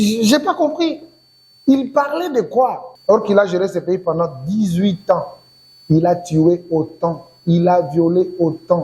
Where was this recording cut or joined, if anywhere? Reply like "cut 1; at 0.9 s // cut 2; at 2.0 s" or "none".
cut 1; at 2.9 s

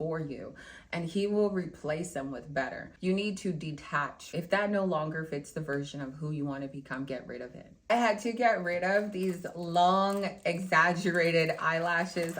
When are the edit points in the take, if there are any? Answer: cut 1; at 2.9 s // cut 2; at 4.2 s // cut 3; at 7.9 s

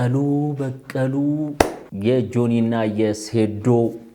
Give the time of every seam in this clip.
cut 1; at 1.8 s

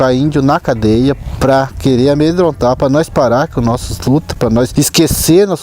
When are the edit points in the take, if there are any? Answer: cut 1; at 4.7 s

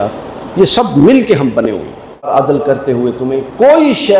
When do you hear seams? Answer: cut 1; at 2.3 s

